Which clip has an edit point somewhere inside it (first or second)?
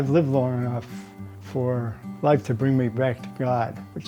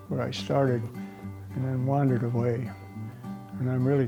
first